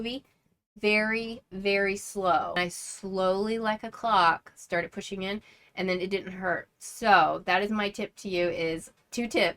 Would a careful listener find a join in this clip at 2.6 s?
yes; 1 cut; at 2.6 s

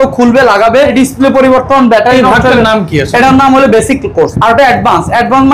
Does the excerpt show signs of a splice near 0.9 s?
yes; 2 cuts; at 0.9 s, 4.3 s

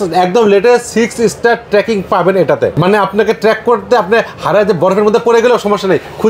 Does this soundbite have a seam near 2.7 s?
yes; 1 cut; at 2.7 s

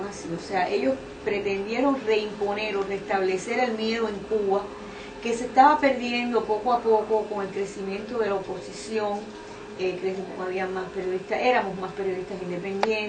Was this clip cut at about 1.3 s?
no; 1 cut; at 6.7 s

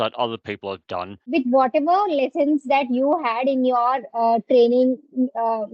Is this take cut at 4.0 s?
no; 1 cut; at 1.2 s

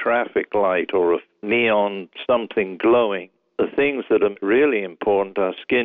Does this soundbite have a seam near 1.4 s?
yes; 3 cuts; at 1.4 s, 3.3 s, 4.4 s

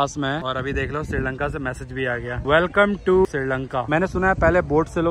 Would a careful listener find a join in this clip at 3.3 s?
yes; 1 cut; at 3.3 s

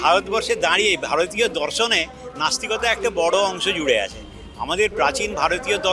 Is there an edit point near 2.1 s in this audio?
no; 0 cuts

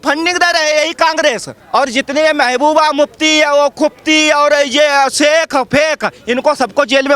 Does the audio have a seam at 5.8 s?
no; 1 cut; at 1.5 s

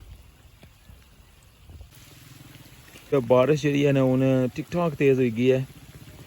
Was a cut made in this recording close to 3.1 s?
yes; 1 cut; at 3.1 s

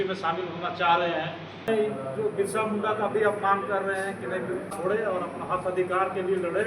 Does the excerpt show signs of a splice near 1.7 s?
yes; 2 cuts; at 1.7 s, 4.7 s

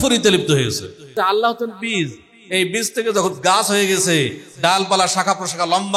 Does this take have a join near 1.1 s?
yes; 1 cut; at 1.1 s

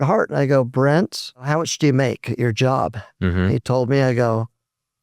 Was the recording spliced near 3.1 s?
no; 1 cut; at 1.5 s

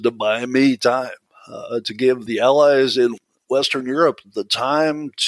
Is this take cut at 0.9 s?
no; 2 cuts; at 2.2 s, 3.2 s

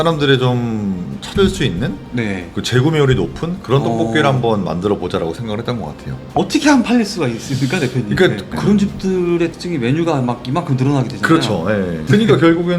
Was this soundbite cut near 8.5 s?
yes; 1 cut; at 8.5 s

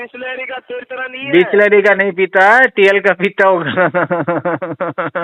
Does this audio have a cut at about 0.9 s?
no; 0 cuts

